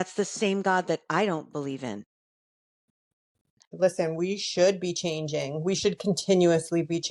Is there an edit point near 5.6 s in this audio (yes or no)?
no